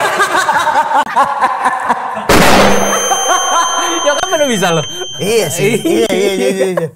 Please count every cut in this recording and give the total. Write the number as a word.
zero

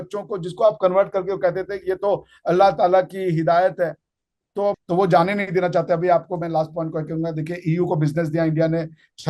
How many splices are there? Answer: one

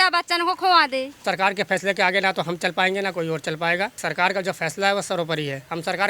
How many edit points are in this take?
two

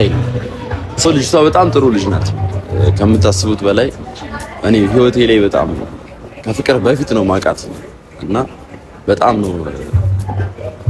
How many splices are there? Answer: one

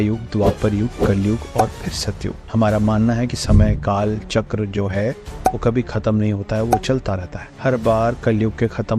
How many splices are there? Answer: zero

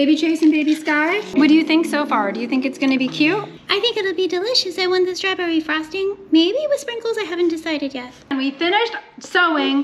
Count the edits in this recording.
three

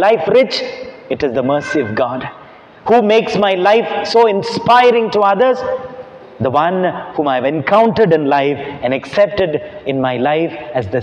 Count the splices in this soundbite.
zero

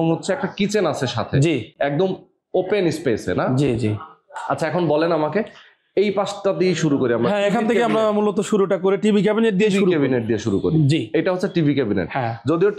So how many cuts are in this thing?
zero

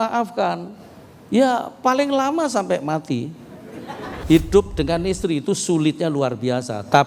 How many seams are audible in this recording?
one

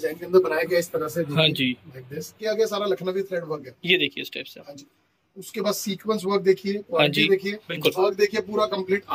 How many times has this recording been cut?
two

